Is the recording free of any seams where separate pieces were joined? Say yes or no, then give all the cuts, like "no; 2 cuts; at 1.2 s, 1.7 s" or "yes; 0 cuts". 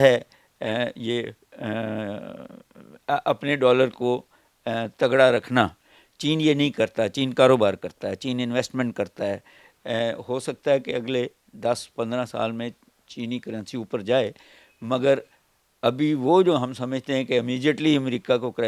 yes; 0 cuts